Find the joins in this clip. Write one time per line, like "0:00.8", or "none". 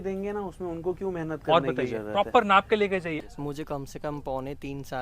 0:03.1